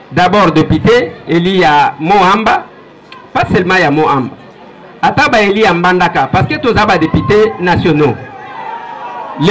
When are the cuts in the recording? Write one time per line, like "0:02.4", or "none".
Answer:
none

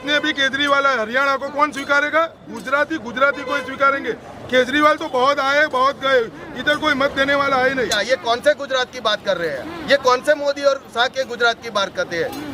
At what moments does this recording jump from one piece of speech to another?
0:08.0

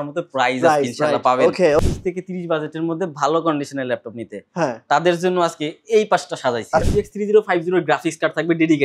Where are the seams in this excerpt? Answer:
0:01.8
0:06.8

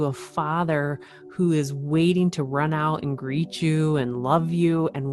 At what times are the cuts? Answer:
none

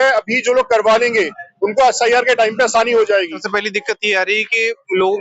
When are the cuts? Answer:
0:03.4

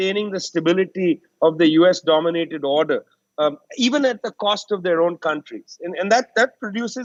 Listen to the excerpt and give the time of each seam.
none

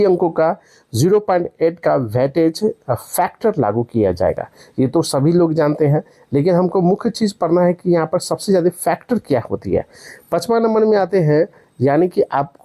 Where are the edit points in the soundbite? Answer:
none

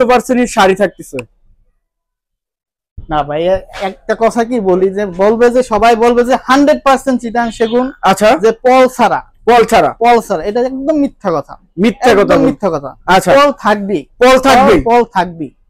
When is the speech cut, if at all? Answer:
none

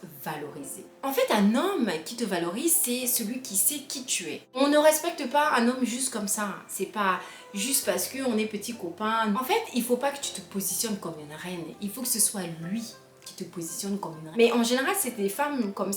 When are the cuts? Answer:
0:04.6
0:09.3
0:14.2

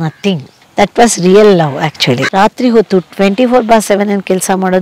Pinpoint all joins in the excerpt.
0:02.2

